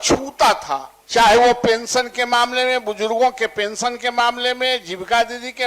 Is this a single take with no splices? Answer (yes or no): no